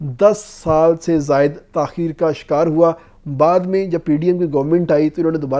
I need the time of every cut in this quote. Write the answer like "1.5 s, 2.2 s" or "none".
none